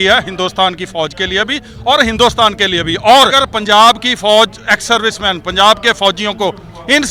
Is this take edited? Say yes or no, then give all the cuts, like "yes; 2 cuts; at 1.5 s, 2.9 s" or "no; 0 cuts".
yes; 1 cut; at 3.4 s